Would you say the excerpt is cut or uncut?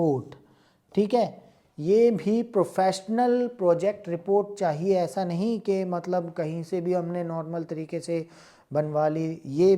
uncut